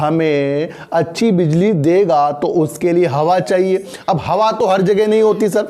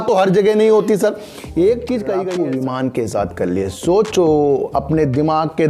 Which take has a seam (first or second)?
second